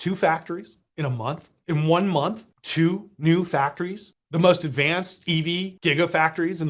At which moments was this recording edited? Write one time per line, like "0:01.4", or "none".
0:05.7